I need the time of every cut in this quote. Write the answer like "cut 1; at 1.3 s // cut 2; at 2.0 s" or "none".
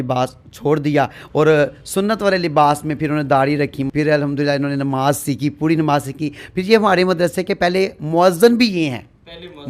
none